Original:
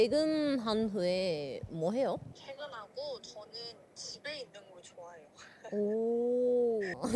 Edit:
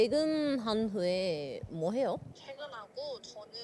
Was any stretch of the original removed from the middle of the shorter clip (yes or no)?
no